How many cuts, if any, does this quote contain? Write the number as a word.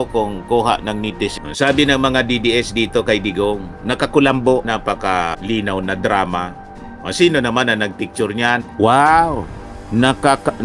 one